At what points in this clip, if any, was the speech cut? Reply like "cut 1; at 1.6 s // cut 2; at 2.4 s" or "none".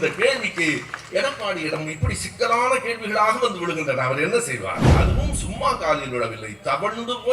cut 1; at 4.9 s